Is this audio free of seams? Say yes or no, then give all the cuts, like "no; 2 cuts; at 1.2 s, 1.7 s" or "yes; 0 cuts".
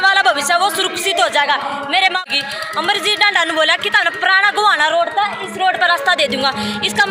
no; 1 cut; at 2.2 s